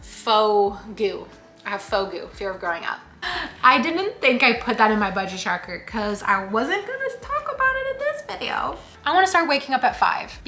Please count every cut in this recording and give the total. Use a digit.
2